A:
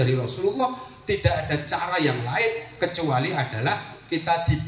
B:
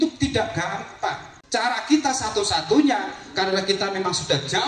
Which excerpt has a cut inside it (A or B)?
B